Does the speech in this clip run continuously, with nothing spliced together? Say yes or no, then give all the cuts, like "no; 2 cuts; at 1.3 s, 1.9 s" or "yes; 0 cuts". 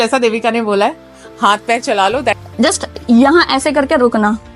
no; 1 cut; at 2.4 s